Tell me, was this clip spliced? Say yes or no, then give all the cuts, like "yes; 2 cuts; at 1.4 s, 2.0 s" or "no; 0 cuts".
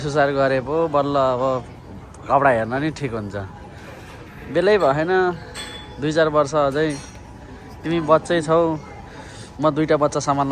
no; 0 cuts